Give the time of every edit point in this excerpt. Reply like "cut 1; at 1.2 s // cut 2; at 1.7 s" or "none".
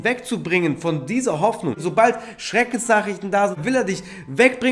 cut 1; at 1.8 s // cut 2; at 3.6 s